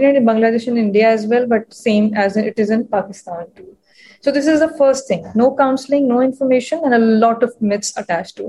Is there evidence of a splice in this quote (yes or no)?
no